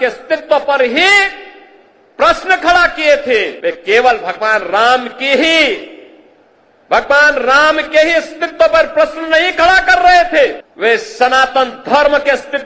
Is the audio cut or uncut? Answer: cut